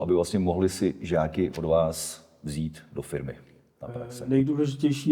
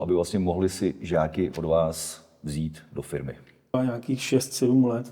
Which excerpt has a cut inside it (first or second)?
second